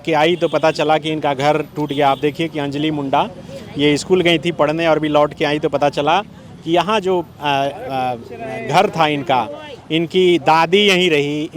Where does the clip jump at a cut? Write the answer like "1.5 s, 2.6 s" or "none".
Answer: none